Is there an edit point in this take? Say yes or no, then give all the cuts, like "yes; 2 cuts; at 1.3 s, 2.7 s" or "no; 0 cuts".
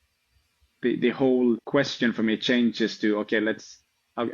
yes; 1 cut; at 1.6 s